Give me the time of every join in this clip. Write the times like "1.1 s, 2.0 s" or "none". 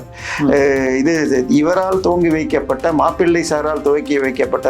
none